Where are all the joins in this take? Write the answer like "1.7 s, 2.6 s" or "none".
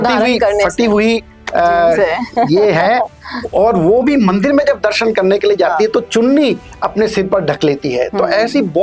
none